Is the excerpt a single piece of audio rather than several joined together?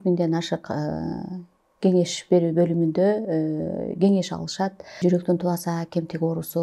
no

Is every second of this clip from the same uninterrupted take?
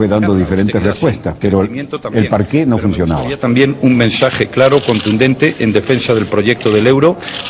no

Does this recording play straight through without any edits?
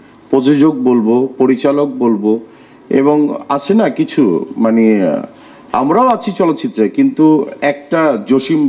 yes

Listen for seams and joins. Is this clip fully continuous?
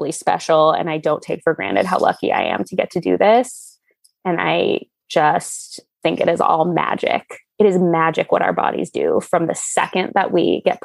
yes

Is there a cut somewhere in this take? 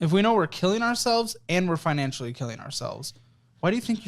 no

